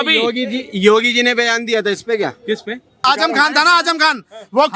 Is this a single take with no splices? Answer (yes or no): no